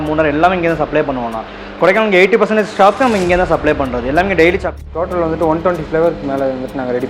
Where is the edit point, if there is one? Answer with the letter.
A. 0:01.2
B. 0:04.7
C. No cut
B